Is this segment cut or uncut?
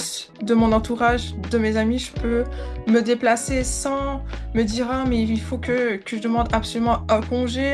uncut